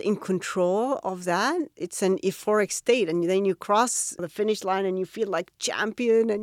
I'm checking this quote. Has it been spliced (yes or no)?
yes